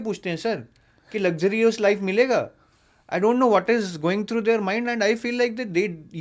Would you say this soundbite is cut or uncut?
uncut